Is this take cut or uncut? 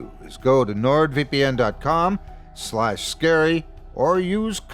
cut